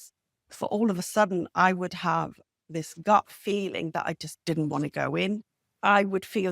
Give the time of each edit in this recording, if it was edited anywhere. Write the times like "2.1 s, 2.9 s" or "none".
5.6 s

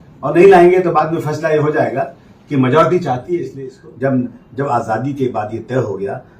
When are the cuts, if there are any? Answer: 3.5 s

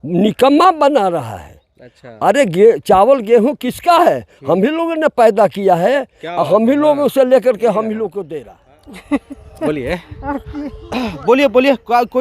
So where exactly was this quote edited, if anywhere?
8.2 s

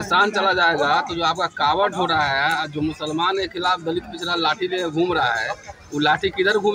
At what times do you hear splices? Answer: none

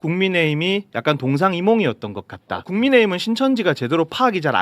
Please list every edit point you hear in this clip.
2.7 s

